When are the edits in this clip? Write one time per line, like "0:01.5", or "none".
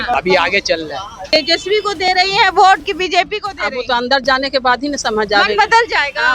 0:01.3